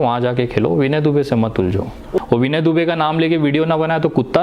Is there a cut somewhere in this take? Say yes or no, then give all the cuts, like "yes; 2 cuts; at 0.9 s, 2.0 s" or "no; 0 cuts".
yes; 1 cut; at 2.2 s